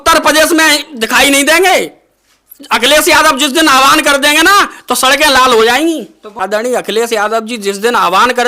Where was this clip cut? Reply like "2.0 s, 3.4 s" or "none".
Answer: 6.4 s